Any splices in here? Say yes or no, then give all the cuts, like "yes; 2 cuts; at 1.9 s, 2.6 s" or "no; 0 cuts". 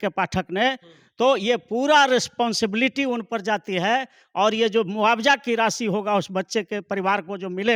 no; 0 cuts